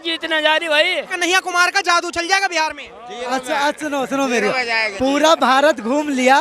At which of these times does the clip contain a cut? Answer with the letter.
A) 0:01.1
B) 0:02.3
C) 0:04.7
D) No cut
A